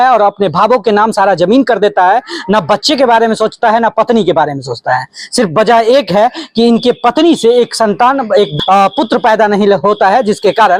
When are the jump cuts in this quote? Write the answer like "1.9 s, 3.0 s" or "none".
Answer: 8.5 s